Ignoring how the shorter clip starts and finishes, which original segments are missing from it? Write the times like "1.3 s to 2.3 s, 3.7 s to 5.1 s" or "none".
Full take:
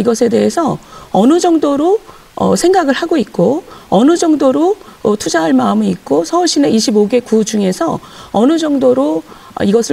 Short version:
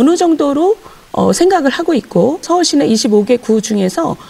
3.7 s to 6.3 s